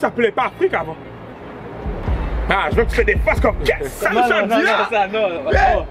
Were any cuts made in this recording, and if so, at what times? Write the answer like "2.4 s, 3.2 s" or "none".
2.1 s